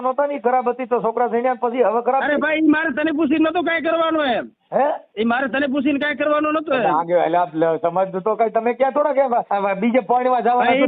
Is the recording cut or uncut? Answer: cut